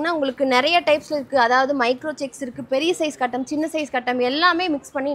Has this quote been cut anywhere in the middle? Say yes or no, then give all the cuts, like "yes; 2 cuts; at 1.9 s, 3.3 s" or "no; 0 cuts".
no; 0 cuts